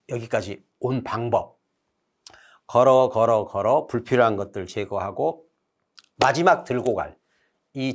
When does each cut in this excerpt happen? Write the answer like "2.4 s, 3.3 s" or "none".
none